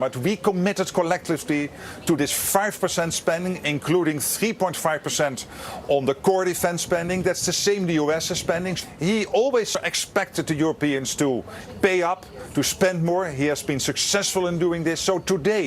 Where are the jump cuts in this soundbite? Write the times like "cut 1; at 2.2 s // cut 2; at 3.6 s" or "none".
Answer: cut 1; at 9.7 s